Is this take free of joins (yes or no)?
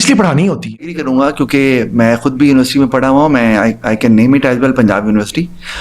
no